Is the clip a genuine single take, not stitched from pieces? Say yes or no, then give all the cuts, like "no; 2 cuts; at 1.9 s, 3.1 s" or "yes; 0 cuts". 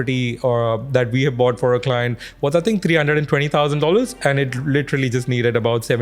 yes; 0 cuts